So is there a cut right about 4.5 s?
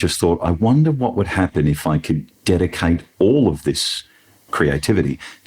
yes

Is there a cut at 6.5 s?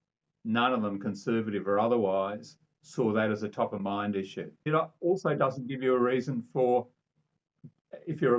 no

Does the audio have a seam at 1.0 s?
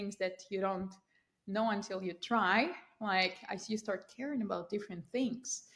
no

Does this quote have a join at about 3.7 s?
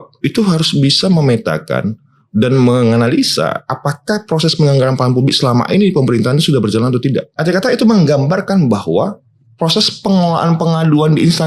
no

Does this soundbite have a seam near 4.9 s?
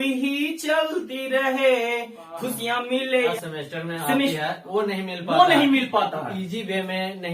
no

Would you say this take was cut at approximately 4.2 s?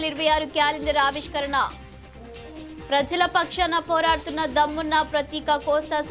no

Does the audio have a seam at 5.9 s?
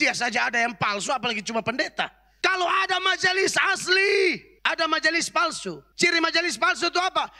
yes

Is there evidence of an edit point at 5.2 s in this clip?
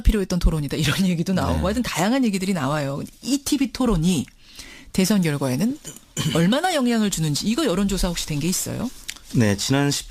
no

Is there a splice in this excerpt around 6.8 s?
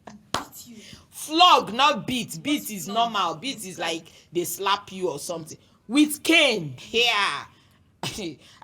yes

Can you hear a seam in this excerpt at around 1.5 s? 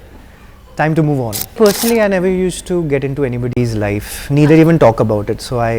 yes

